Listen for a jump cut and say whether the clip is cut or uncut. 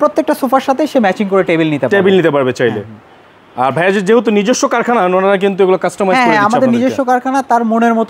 uncut